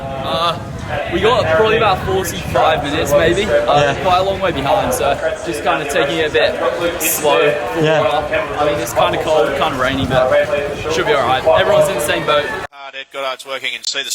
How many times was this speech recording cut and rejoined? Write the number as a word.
one